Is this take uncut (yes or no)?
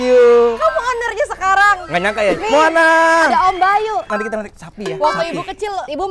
no